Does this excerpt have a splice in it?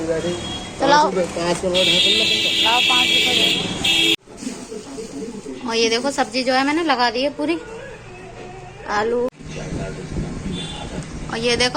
yes; 2 cuts; at 4.1 s, 9.4 s

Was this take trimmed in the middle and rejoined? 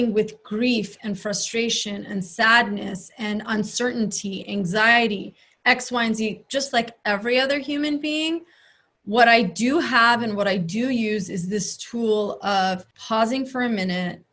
yes; 1 cut; at 12.9 s

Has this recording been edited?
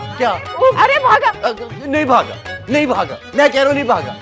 no; 0 cuts

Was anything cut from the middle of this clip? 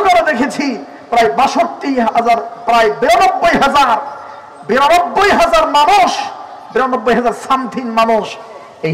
no; 0 cuts

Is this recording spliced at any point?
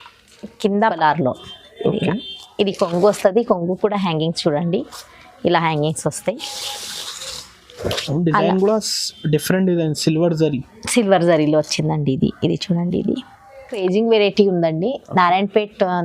yes; 2 cuts; at 0.9 s, 13.8 s

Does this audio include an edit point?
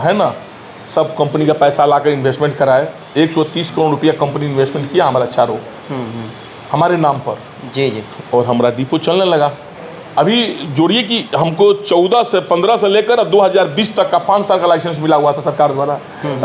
no; 0 cuts

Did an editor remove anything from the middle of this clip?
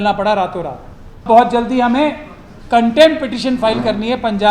yes; 1 cut; at 1.2 s

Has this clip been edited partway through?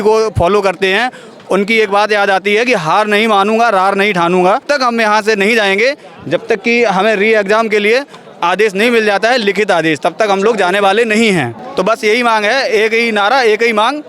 yes; 2 cuts; at 4.6 s, 11.6 s

